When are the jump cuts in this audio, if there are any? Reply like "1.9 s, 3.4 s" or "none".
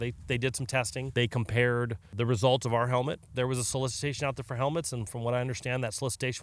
1.1 s, 2.1 s, 3.2 s